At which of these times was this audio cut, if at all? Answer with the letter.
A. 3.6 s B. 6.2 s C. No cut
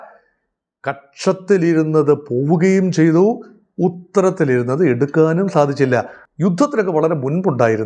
B